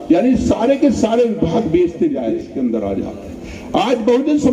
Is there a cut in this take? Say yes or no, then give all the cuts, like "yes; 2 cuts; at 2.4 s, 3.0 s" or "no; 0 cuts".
yes; 1 cut; at 2.3 s